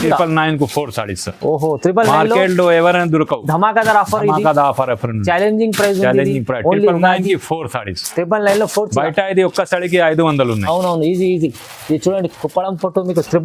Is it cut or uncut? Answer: uncut